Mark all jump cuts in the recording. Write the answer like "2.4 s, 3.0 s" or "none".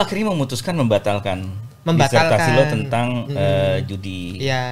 none

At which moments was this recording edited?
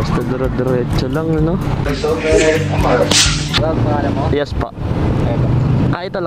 3.5 s

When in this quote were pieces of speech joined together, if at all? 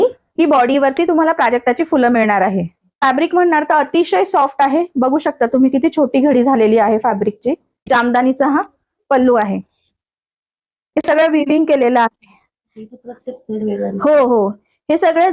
2.8 s, 7.7 s

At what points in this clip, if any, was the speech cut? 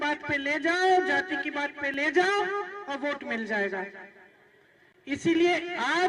none

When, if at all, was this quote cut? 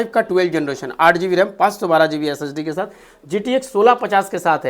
none

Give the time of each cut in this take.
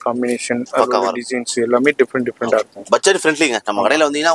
none

